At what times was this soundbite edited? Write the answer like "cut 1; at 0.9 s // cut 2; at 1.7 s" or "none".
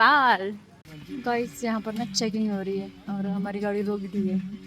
cut 1; at 1.0 s